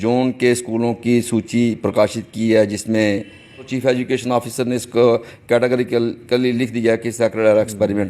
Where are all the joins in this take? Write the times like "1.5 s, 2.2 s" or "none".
3.7 s